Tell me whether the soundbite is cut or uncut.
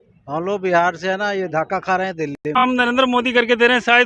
cut